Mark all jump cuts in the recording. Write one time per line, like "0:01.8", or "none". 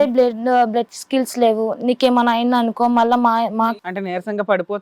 0:03.7